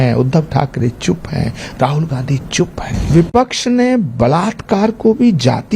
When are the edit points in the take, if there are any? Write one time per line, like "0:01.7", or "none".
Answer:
0:03.1